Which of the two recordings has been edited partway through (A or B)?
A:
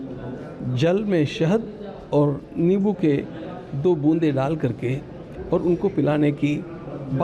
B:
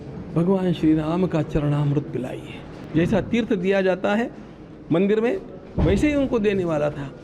B